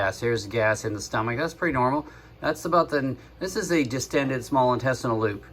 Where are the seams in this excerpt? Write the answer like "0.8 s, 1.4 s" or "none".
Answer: none